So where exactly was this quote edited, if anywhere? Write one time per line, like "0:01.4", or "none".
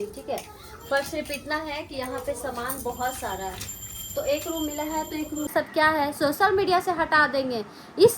0:05.5